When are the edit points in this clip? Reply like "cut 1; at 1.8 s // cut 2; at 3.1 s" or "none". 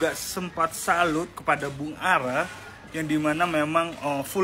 none